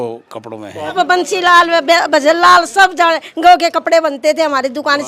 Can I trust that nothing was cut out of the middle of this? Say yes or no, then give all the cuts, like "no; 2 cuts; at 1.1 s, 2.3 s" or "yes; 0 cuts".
no; 1 cut; at 0.9 s